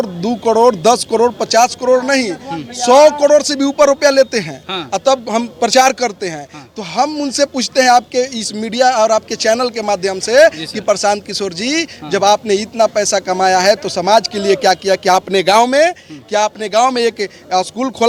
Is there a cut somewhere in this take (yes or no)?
no